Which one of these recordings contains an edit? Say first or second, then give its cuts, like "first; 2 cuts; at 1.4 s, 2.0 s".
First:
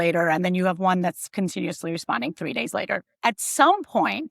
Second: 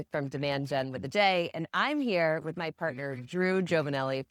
first; 1 cut; at 3.1 s